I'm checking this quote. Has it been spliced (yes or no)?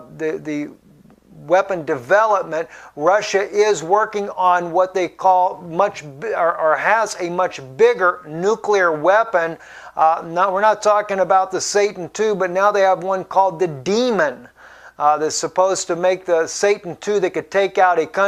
no